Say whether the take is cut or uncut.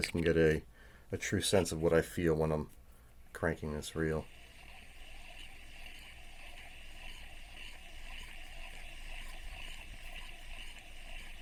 uncut